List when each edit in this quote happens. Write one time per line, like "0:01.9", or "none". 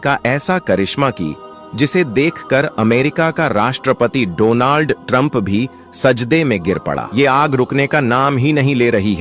0:07.0